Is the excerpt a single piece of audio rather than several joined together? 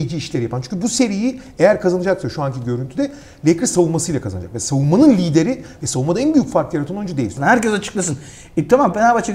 no; 1 cut; at 7.4 s

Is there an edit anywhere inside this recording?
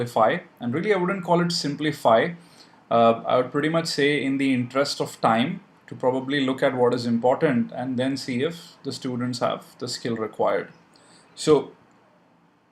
yes; 1 cut; at 5.7 s

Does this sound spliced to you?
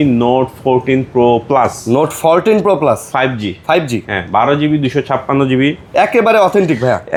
no; 0 cuts

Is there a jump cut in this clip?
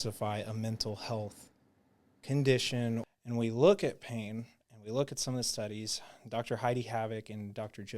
yes; 1 cut; at 3.1 s

